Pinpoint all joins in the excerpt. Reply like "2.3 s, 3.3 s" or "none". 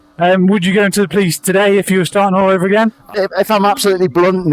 3.1 s